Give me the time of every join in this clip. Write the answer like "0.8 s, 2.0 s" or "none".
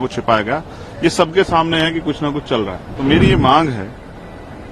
2.8 s